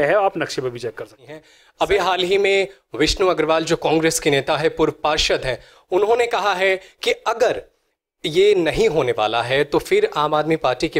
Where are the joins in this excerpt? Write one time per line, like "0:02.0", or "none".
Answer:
0:01.6